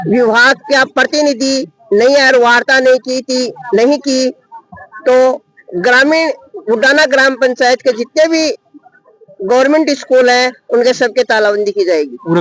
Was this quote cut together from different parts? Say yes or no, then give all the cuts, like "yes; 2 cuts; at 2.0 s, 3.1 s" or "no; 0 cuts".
no; 0 cuts